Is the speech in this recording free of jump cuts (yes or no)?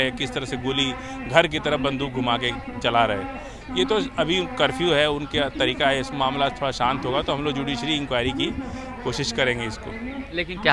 yes